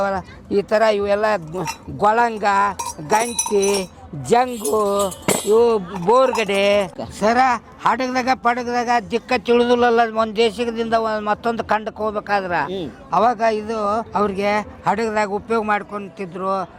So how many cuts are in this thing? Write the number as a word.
one